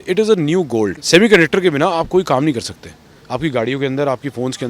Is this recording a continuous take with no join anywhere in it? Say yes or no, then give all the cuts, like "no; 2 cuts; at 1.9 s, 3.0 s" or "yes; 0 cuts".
no; 1 cut; at 1.0 s